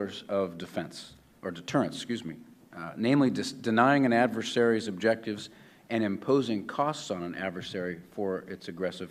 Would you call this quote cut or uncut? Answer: uncut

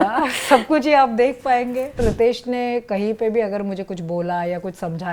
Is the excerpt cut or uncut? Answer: cut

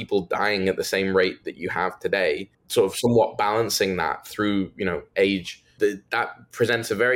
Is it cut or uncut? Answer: cut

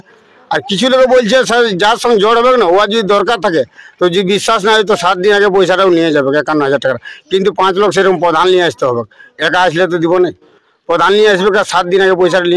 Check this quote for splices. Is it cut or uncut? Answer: uncut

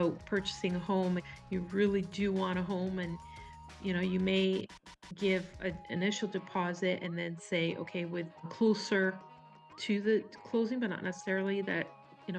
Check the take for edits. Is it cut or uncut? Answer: cut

